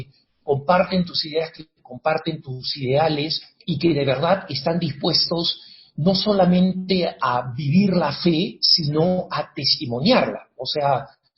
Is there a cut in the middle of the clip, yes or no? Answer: yes